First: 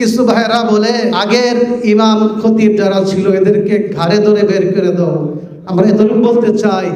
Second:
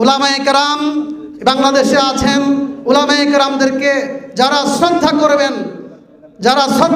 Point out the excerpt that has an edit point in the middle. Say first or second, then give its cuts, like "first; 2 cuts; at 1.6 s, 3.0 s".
first; 1 cut; at 1.2 s